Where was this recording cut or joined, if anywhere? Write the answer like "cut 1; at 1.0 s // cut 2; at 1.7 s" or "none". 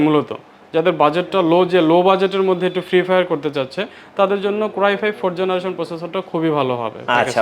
none